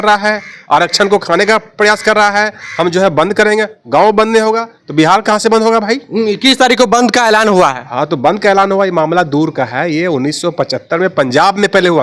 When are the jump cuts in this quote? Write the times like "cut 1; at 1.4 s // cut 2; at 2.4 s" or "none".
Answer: none

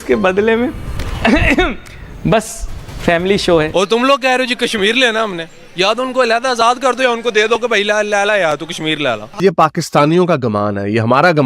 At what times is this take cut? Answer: cut 1; at 3.7 s // cut 2; at 9.4 s

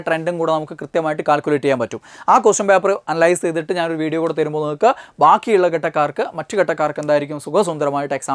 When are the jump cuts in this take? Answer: none

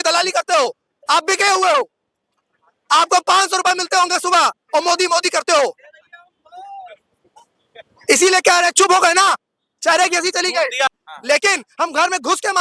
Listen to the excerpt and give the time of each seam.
cut 1; at 10.9 s

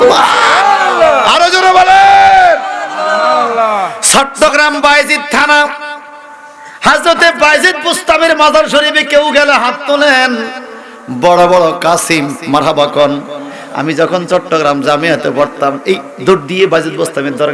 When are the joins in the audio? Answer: none

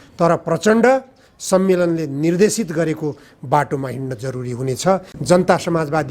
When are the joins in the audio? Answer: cut 1; at 5.1 s

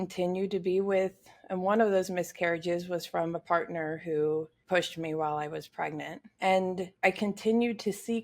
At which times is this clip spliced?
cut 1; at 4.5 s // cut 2; at 6.2 s // cut 3; at 6.9 s

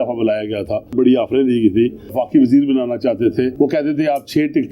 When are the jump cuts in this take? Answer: cut 1; at 0.9 s // cut 2; at 2.1 s // cut 3; at 3.5 s

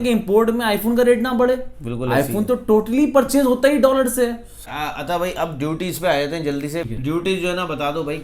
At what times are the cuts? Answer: cut 1; at 4.5 s // cut 2; at 6.8 s

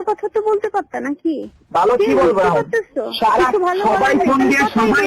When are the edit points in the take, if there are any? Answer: none

